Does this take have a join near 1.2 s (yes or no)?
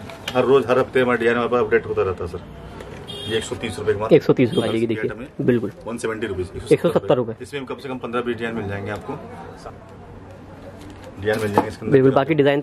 no